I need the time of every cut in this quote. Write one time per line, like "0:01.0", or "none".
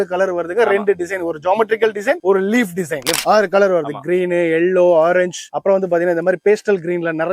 0:03.1